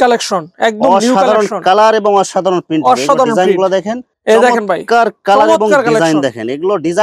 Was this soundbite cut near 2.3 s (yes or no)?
no